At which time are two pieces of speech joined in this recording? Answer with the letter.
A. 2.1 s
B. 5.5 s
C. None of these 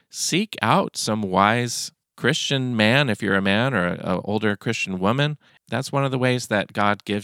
B